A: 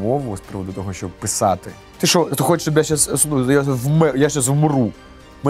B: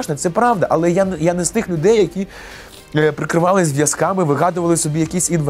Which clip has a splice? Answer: A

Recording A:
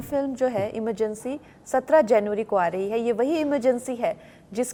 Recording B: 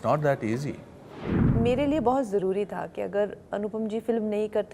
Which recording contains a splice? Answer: B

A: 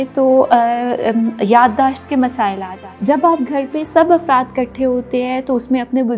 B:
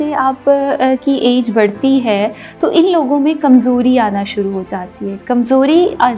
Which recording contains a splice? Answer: A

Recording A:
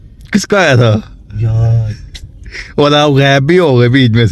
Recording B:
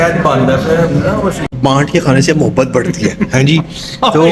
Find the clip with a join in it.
B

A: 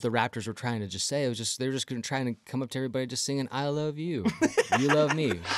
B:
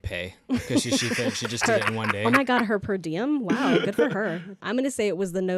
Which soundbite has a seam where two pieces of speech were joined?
B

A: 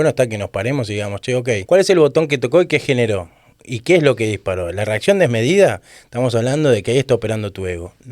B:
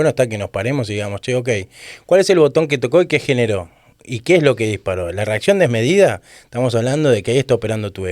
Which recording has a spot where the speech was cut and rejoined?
A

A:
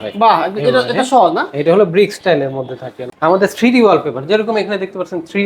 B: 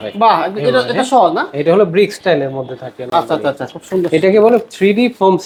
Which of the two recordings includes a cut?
A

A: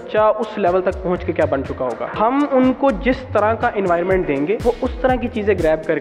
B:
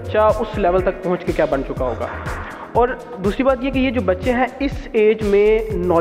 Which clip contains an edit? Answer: A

